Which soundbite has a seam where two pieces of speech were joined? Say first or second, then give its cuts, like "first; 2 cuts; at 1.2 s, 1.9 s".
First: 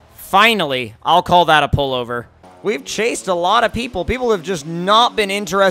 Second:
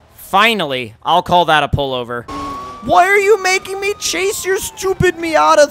second; 1 cut; at 2.6 s